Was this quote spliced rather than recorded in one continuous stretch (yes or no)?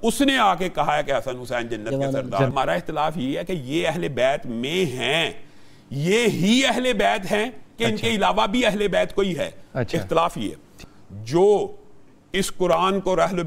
yes